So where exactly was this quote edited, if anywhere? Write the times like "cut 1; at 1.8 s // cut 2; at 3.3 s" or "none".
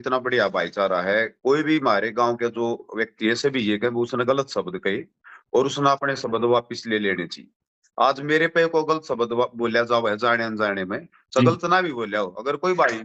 none